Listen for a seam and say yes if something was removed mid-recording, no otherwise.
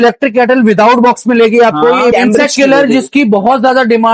yes